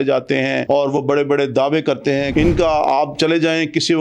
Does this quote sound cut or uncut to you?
cut